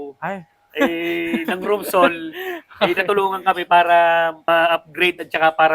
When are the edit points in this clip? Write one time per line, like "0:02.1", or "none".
0:04.4